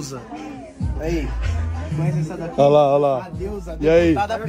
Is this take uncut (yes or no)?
yes